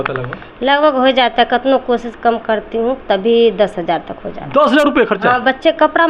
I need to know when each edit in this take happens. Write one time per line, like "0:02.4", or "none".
none

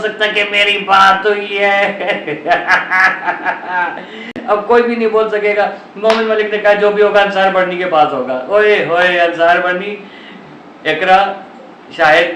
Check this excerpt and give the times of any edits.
none

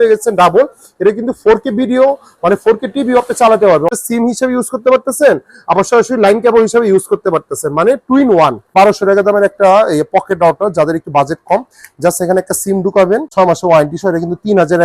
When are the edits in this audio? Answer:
0:03.9
0:08.7
0:13.3

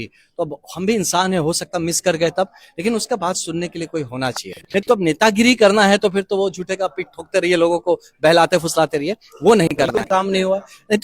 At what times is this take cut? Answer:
0:04.9
0:09.9

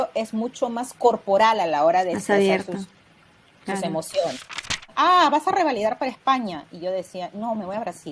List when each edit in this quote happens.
0:04.9

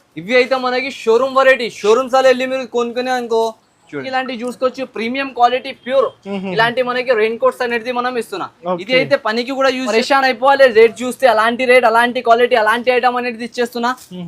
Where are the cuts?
0:04.0
0:10.2

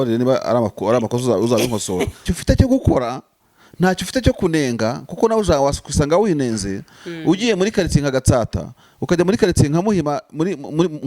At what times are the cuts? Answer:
0:02.3

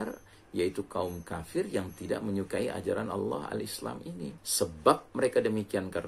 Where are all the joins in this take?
0:04.4

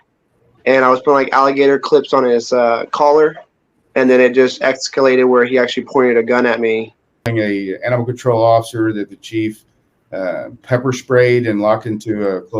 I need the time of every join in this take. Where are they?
0:07.3

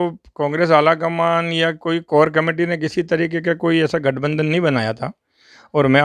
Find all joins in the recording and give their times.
none

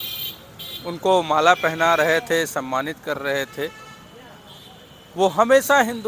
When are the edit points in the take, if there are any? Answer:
none

